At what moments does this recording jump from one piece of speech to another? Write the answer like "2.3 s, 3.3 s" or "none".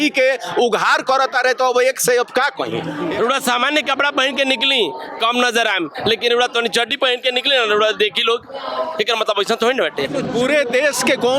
3.0 s, 10.2 s